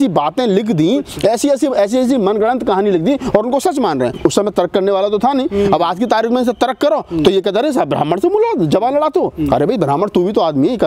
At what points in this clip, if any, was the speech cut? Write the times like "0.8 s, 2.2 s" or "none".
4.1 s